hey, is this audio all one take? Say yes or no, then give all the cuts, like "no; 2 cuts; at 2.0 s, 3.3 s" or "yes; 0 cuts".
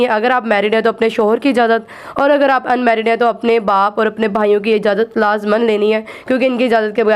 yes; 0 cuts